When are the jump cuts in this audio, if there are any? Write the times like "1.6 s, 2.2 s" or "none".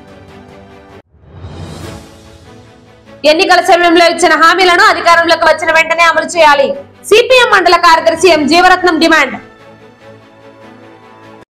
none